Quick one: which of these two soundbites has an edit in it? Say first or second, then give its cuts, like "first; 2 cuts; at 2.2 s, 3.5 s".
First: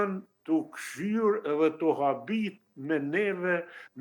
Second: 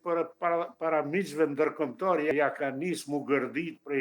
second; 1 cut; at 2.3 s